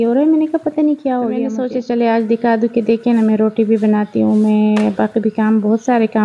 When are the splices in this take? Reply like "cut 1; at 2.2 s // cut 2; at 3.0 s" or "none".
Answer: cut 1; at 1.5 s